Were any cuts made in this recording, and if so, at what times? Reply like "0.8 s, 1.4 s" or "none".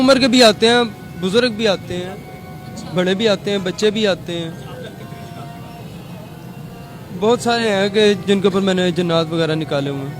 none